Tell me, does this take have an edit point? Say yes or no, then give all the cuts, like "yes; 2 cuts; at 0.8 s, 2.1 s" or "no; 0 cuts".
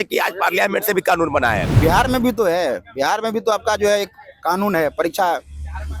yes; 1 cut; at 1.7 s